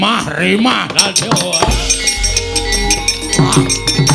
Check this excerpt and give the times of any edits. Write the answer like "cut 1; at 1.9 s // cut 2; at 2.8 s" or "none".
none